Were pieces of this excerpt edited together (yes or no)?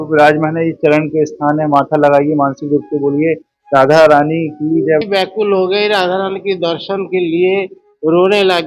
yes